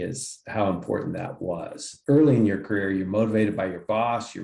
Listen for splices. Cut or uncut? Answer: cut